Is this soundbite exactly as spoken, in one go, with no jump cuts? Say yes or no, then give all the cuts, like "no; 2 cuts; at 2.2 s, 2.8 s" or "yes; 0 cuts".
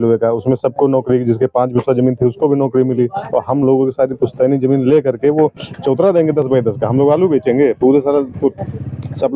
yes; 0 cuts